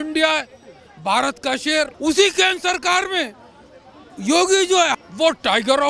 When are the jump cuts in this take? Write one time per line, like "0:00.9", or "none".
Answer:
0:01.9
0:04.9